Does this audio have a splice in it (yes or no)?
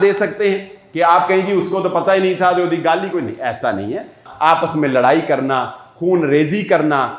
yes